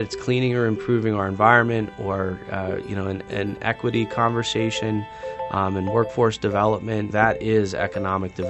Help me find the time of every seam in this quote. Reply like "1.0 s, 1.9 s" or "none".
7.1 s